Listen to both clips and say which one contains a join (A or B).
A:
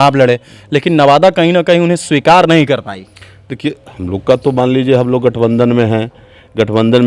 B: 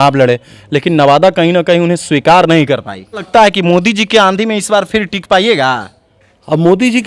B